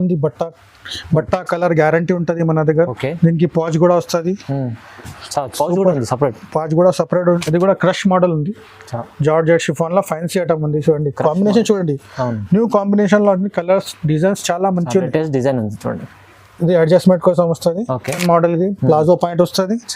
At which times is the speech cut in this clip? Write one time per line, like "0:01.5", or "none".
0:07.4
0:18.2